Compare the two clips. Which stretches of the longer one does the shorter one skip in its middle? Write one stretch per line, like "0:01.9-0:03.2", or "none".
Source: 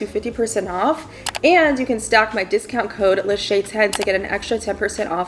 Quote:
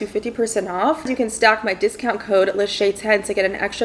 0:01.1-0:01.8